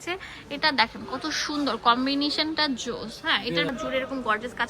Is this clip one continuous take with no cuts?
no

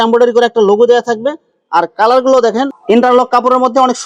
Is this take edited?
no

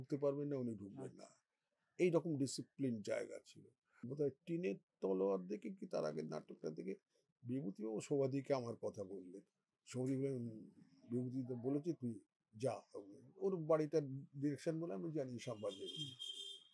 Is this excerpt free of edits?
no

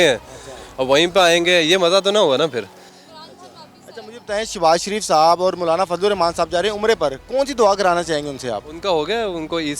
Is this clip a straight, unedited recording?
yes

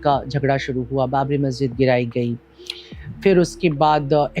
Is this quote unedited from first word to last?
yes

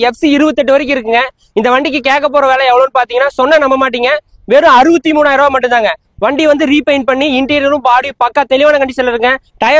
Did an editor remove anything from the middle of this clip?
no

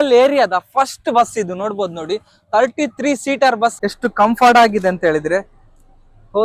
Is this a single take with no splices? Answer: no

